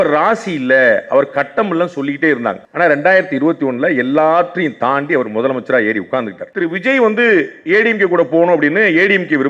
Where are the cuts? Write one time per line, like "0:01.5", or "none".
0:06.4